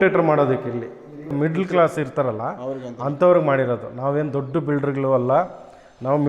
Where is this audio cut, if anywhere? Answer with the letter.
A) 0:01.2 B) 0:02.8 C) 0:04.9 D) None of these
A